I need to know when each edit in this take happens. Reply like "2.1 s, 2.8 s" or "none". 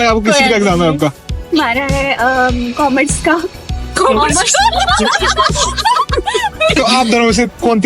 6.8 s